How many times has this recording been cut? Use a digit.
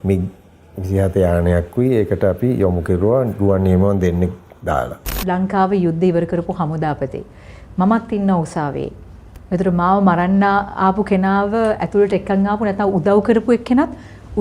1